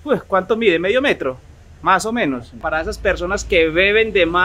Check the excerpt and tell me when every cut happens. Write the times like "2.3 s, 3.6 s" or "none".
2.6 s

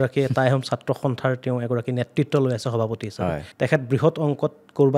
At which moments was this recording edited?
3.5 s

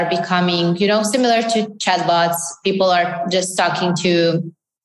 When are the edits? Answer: none

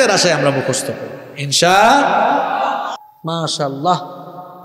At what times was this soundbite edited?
3.1 s

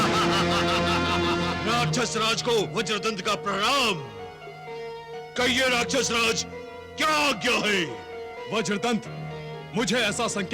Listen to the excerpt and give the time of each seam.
1.6 s

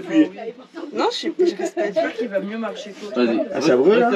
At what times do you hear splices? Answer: none

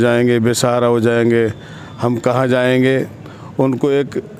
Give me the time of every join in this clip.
none

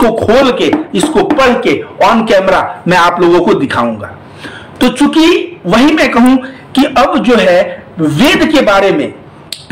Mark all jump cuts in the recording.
none

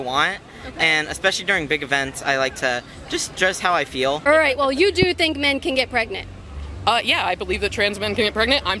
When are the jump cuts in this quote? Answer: 4.2 s

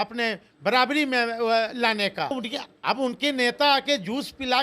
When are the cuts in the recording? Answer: 2.3 s

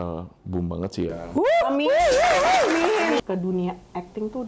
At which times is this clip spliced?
3.2 s

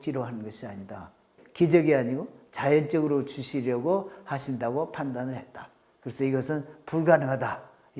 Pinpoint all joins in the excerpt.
1.3 s

